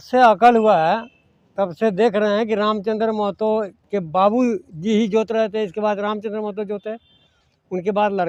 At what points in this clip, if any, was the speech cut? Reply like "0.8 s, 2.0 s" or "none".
none